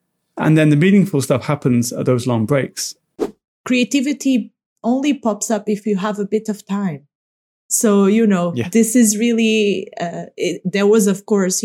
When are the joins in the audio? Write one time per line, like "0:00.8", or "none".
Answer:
0:03.2